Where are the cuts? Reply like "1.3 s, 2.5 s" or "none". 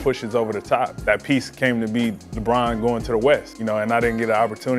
1.0 s, 3.5 s

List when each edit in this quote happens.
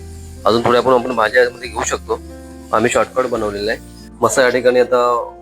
4.0 s

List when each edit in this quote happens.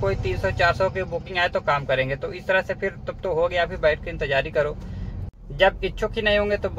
5.6 s

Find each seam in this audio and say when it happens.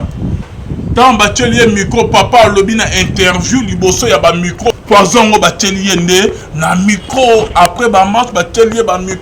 4.7 s

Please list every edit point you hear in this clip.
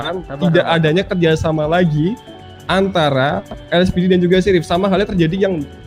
none

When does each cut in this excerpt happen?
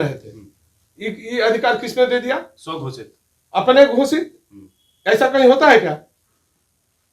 none

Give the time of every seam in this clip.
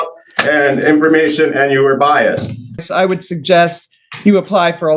2.9 s

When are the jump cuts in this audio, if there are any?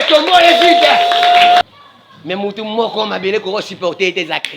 1.6 s

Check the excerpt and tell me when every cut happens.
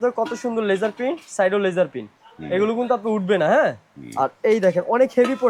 none

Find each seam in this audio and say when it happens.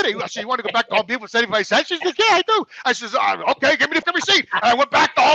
4.0 s

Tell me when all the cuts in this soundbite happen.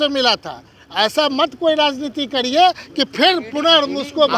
none

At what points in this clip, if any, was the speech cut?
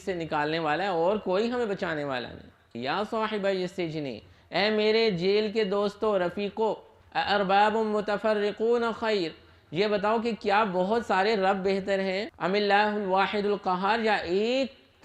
2.7 s, 12.3 s

